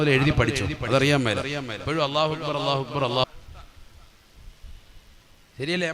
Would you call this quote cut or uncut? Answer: cut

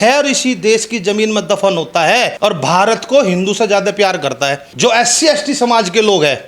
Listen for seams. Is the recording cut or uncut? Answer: cut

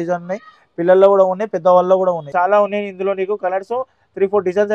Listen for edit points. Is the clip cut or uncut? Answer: cut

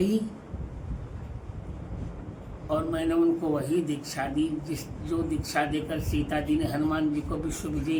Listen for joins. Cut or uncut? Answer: uncut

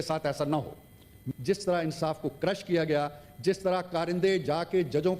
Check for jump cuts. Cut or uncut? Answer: cut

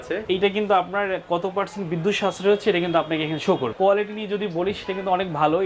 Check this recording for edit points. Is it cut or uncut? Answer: cut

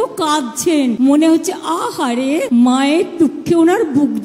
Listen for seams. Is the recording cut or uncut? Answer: uncut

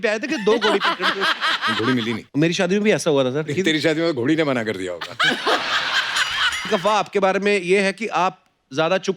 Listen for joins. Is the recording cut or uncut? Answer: cut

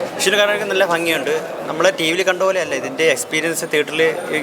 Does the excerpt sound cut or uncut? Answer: uncut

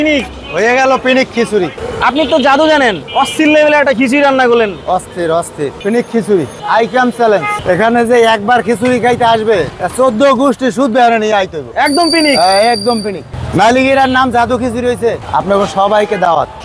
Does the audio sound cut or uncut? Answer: cut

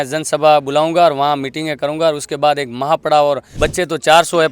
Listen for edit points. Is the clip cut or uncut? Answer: cut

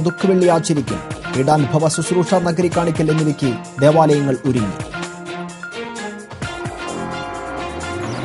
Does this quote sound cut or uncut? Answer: uncut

